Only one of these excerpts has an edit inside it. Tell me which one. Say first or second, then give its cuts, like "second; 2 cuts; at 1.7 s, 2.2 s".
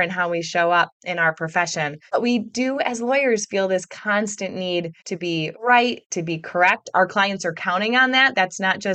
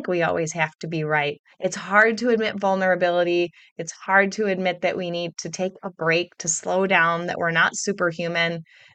first; 2 cuts; at 2.0 s, 5.3 s